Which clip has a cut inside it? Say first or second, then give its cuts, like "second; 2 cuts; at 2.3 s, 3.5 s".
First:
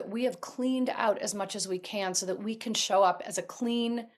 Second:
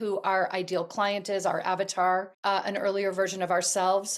second; 1 cut; at 2.7 s